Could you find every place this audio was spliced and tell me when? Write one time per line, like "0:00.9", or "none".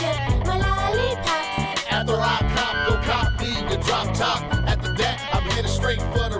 none